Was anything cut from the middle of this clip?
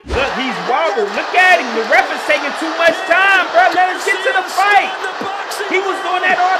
yes; 1 cut; at 1.1 s

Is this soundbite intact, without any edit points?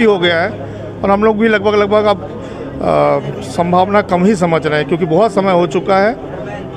yes; 0 cuts

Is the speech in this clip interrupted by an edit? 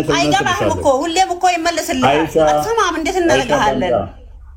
no; 0 cuts

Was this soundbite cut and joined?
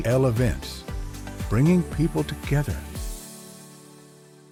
no; 0 cuts

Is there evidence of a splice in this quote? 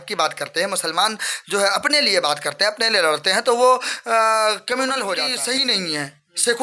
yes; 1 cut; at 5.3 s

